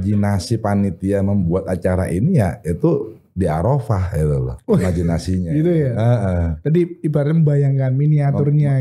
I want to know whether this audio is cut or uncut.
uncut